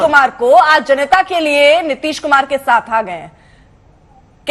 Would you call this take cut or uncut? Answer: uncut